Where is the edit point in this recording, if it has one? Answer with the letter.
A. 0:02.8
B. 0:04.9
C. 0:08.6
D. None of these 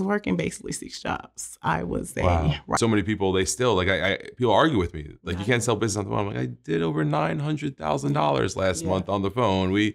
A